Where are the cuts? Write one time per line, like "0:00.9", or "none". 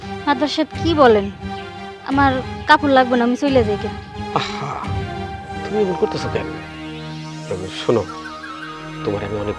none